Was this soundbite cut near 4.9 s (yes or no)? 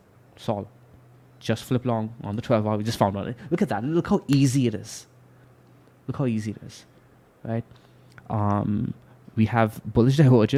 no